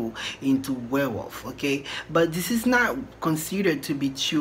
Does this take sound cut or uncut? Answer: uncut